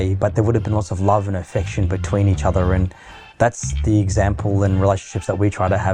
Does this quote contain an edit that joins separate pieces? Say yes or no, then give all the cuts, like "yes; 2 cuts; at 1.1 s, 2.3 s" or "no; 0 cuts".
no; 0 cuts